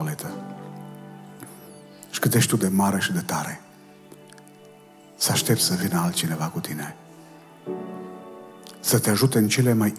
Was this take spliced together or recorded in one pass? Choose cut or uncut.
uncut